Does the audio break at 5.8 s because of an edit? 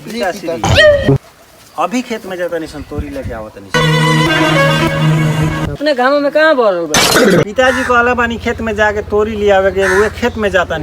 yes; 1 cut; at 5.8 s

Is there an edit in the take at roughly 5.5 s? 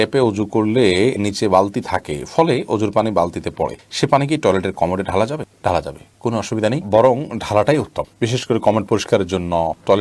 no; 0 cuts

